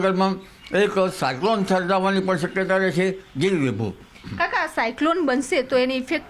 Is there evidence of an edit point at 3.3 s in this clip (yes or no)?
no